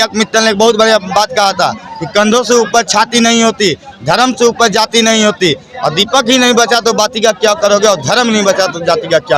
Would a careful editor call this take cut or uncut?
uncut